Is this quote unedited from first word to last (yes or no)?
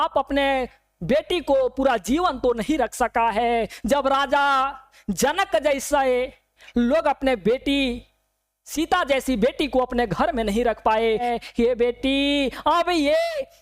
no